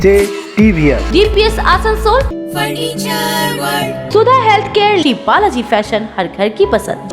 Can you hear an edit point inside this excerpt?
yes; 2 cuts; at 2.3 s, 4.1 s

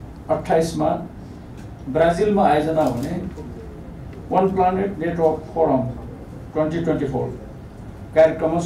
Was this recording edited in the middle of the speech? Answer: no; 0 cuts

